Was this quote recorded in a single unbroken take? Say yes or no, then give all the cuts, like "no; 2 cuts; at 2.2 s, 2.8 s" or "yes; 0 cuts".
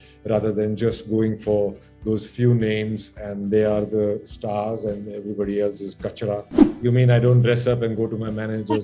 no; 1 cut; at 6.6 s